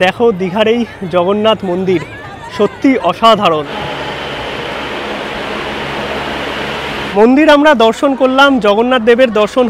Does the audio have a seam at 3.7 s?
yes; 2 cuts; at 3.7 s, 7.1 s

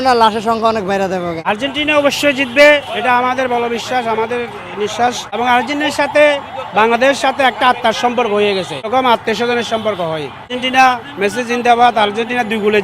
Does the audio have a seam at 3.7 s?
no; 4 cuts; at 1.4 s, 5.4 s, 8.9 s, 10.5 s

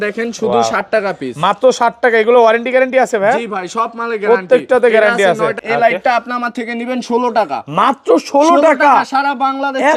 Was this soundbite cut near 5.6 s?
yes; 1 cut; at 5.6 s

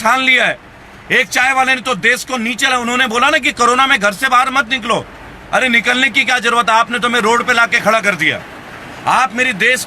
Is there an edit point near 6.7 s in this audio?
no; 0 cuts

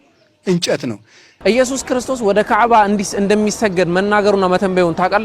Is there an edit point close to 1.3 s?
yes; 1 cut; at 1.3 s

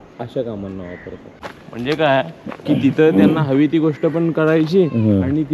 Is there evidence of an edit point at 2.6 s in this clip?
no; 1 cut; at 1.3 s

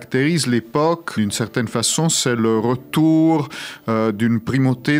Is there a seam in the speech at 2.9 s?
no; 1 cut; at 1.1 s

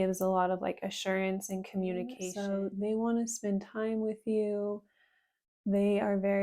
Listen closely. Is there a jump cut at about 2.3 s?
yes; 1 cut; at 2.3 s

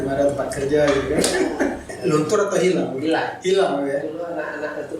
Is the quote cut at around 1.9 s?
yes; 1 cut; at 1.9 s

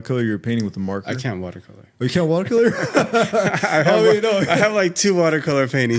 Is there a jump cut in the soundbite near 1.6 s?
no; 0 cuts

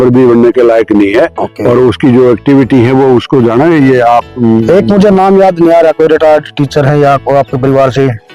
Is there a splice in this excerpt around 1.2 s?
no; 0 cuts

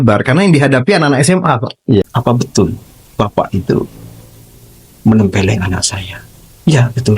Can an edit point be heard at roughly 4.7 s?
no; 1 cut; at 2.0 s

